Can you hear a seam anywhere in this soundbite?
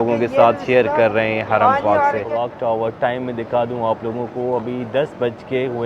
yes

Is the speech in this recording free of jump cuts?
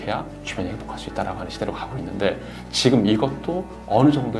yes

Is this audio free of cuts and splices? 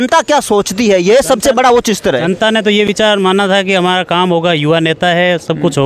yes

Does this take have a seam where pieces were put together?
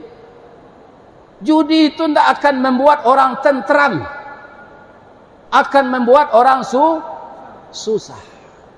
no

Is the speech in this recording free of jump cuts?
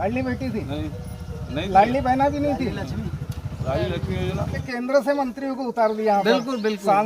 no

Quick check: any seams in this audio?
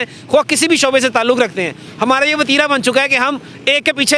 no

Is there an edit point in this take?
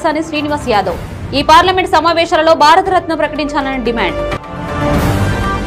no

